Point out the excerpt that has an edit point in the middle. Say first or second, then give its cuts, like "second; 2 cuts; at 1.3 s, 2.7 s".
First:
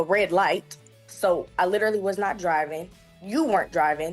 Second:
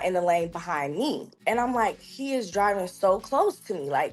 second; 1 cut; at 1.3 s